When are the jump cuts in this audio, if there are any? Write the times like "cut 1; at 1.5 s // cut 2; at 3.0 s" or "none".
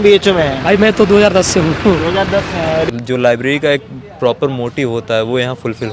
cut 1; at 2.9 s

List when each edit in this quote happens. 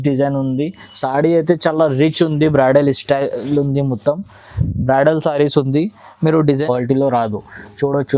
cut 1; at 6.6 s

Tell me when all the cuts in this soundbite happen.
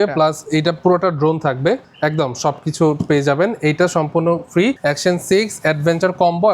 cut 1; at 1.9 s // cut 2; at 4.8 s

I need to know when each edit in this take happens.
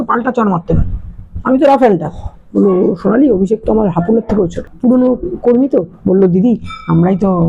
cut 1; at 4.6 s

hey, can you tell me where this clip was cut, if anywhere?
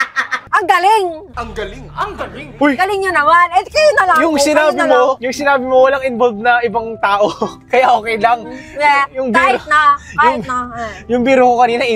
cut 1; at 2.4 s

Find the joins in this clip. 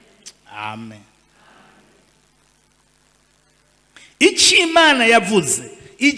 none

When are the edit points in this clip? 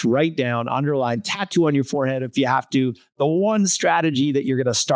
none

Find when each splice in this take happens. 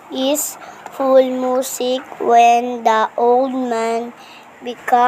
cut 1; at 2.3 s // cut 2; at 3.5 s

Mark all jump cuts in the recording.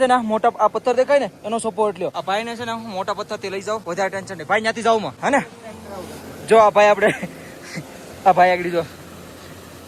cut 1; at 2.2 s // cut 2; at 3.8 s // cut 3; at 5.1 s

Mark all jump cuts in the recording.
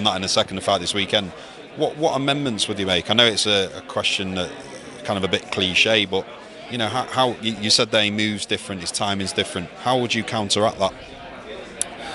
cut 1; at 2.5 s

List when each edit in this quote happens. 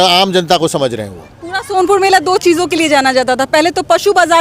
none

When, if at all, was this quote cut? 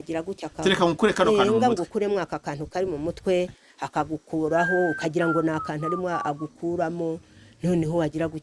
none

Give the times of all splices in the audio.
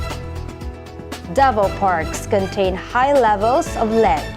cut 1; at 1.3 s

